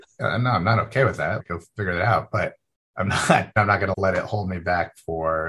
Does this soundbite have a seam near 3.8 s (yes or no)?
yes